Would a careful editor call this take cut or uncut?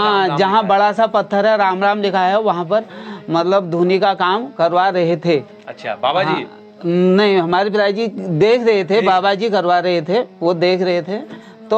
uncut